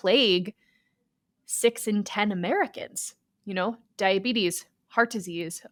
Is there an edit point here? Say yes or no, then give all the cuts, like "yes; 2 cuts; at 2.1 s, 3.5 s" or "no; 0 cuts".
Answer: no; 0 cuts